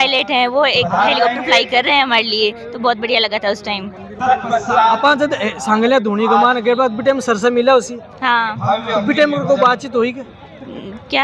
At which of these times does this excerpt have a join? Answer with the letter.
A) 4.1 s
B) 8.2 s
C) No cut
C